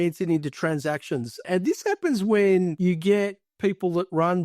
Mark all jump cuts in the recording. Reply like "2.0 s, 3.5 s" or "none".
1.4 s